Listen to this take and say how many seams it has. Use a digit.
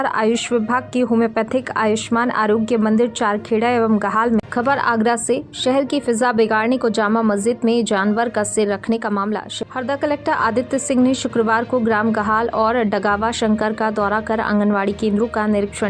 2